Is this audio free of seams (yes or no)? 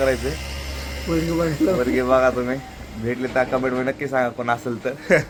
yes